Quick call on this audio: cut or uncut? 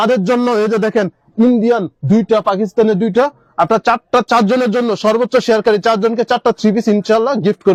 uncut